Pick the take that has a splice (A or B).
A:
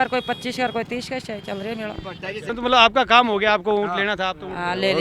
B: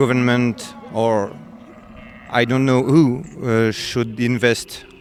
A